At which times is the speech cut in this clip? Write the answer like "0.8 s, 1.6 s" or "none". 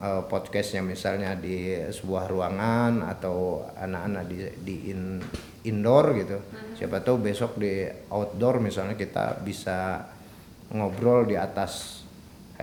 none